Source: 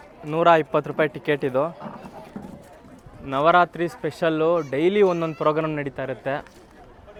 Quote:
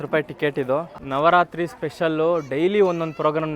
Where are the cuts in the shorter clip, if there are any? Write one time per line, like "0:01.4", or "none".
0:01.0